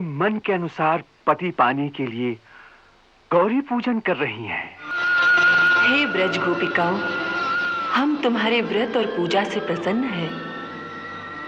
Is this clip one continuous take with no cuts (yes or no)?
no